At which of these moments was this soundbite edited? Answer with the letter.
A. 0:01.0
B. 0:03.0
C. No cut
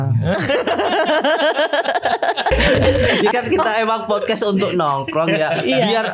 B